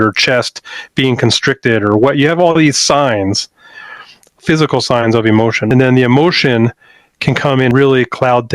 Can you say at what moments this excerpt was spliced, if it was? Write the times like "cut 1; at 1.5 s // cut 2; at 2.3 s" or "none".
cut 1; at 4.4 s // cut 2; at 5.7 s // cut 3; at 7.7 s